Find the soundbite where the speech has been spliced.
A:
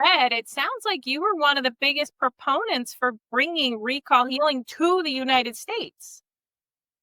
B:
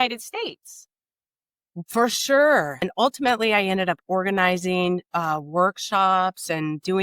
B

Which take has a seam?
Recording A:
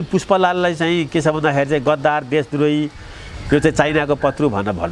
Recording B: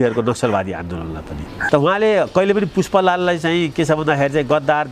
B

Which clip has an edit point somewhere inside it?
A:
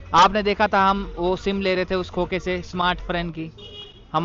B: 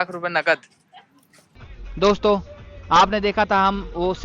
B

